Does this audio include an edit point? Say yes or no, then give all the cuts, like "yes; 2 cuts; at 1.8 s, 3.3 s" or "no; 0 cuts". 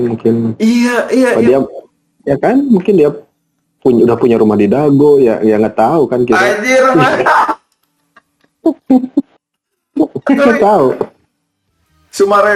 no; 0 cuts